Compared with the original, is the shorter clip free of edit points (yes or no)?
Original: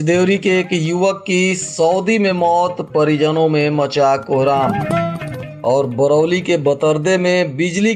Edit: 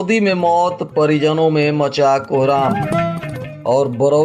yes